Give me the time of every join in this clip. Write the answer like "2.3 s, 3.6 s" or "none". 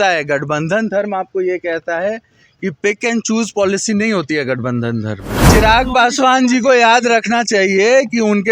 5.5 s